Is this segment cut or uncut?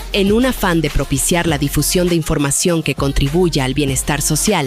uncut